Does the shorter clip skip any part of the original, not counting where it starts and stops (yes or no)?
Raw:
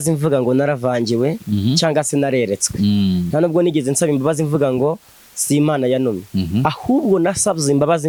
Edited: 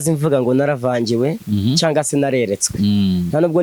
no